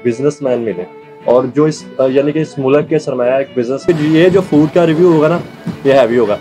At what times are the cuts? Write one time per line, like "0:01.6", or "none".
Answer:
0:03.8